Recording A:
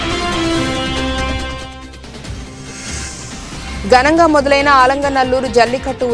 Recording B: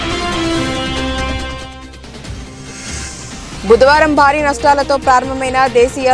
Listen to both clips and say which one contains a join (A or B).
A